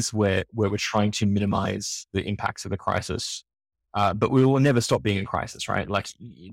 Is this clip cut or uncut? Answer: uncut